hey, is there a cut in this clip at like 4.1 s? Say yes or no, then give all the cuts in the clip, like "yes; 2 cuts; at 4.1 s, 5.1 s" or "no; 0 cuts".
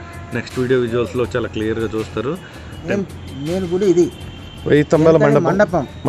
no; 1 cut; at 2.9 s